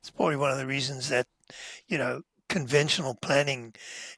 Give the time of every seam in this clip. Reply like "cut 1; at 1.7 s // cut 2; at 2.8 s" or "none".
none